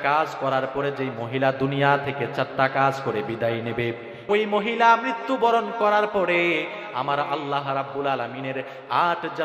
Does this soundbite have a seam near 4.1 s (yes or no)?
yes